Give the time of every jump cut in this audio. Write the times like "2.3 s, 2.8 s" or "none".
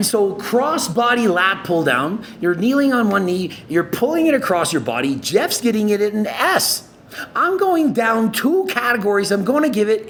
none